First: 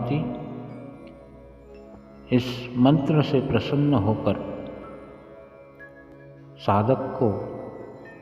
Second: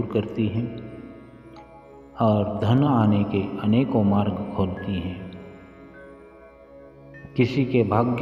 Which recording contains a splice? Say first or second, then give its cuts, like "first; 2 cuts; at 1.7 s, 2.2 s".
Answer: first; 2 cuts; at 5.2 s, 6.6 s